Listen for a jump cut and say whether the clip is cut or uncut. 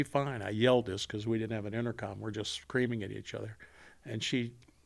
uncut